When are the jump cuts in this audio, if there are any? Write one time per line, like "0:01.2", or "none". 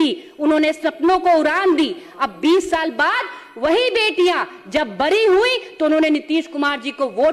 none